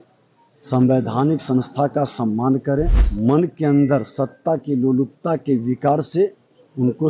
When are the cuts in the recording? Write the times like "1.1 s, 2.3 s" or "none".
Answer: 3.0 s